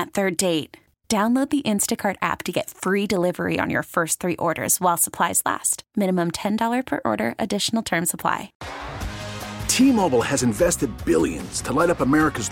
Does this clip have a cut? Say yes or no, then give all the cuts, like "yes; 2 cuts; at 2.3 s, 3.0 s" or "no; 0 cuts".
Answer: yes; 1 cut; at 8.6 s